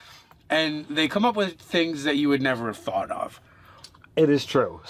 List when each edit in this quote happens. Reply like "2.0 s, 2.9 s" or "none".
none